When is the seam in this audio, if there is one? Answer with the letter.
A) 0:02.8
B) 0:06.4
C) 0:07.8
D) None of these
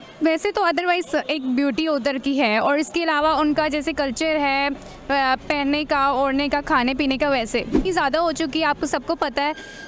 C